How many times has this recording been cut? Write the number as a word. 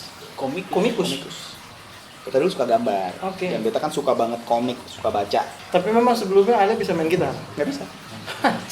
one